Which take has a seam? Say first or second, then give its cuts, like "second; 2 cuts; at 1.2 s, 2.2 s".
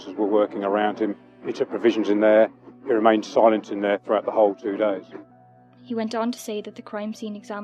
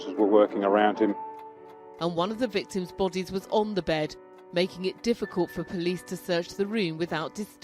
second; 1 cut; at 1.3 s